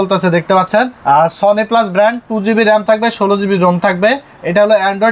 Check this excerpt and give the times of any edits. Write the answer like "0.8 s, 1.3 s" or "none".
none